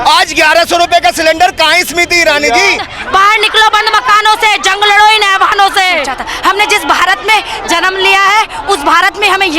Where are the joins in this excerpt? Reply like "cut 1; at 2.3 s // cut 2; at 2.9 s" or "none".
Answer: cut 1; at 2.9 s // cut 2; at 6.2 s